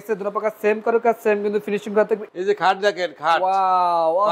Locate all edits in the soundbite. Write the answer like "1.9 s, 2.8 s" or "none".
2.2 s